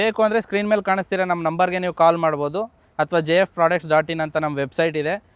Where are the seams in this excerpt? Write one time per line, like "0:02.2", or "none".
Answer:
none